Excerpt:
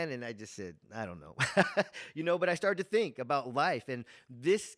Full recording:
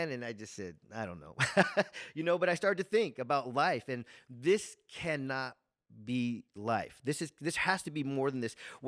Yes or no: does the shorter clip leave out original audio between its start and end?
no